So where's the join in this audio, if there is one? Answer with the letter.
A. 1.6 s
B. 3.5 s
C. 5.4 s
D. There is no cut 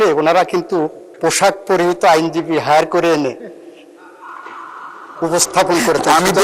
D